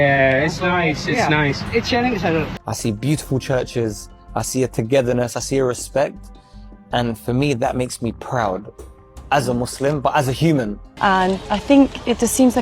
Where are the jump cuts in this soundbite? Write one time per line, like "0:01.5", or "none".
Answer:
0:02.5
0:10.9